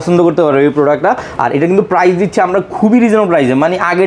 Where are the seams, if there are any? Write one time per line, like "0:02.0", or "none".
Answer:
none